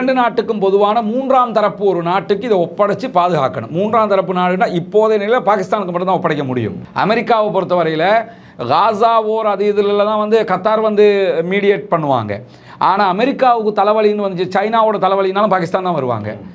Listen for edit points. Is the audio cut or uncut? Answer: cut